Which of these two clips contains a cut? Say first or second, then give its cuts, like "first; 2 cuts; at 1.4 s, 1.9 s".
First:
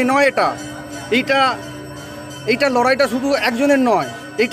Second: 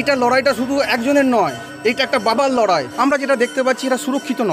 second; 1 cut; at 2.9 s